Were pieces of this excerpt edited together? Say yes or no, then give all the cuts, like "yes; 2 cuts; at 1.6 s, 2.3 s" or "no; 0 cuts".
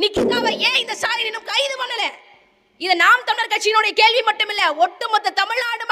no; 0 cuts